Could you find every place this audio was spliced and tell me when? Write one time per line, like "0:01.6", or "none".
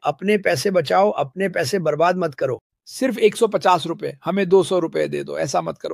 0:02.7